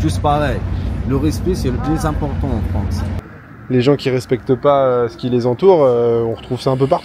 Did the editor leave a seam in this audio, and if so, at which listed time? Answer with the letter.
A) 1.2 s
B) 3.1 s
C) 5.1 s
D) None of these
B